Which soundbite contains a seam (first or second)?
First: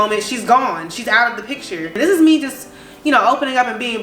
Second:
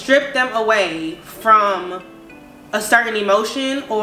first